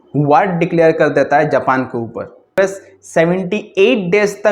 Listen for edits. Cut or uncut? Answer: cut